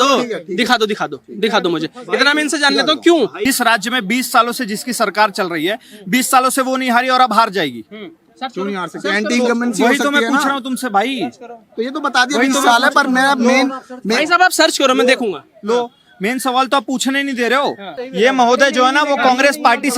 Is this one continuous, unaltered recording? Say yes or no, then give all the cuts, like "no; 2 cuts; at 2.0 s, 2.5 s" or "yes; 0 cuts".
no; 2 cuts; at 3.4 s, 18.1 s